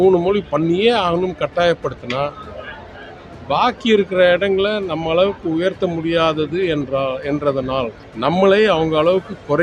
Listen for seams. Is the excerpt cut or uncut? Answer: cut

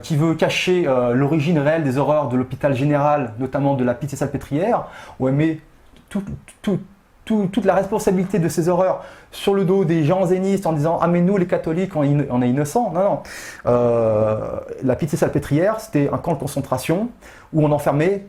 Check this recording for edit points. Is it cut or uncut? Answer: uncut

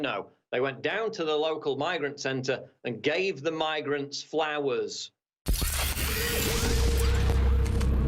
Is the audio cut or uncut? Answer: cut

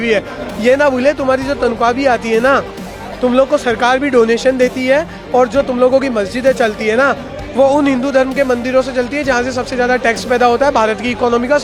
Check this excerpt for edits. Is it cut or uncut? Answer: uncut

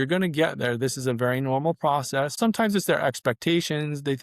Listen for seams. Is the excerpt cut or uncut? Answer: cut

